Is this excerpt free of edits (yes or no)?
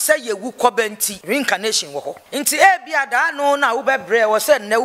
no